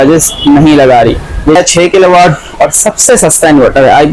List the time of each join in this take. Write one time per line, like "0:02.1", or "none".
0:01.6